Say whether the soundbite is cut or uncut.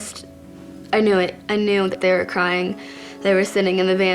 cut